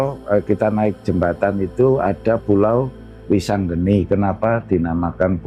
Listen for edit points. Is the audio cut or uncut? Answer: uncut